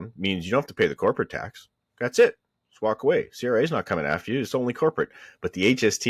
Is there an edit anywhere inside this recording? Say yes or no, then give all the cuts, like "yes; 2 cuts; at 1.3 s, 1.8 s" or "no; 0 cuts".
no; 0 cuts